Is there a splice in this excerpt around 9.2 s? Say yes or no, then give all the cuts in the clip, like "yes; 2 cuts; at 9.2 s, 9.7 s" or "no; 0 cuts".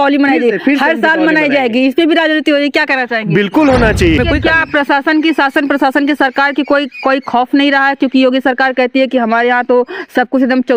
no; 1 cut; at 4.2 s